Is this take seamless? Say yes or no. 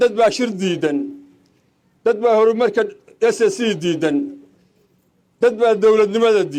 yes